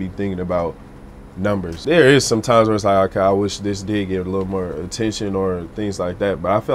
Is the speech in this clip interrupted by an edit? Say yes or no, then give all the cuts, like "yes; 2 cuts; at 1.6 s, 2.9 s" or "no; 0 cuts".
yes; 1 cut; at 1.7 s